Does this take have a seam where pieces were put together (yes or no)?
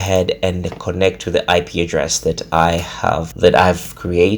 yes